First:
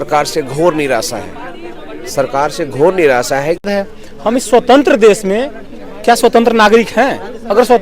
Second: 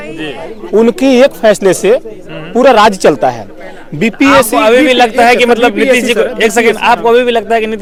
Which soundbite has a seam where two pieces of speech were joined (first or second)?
first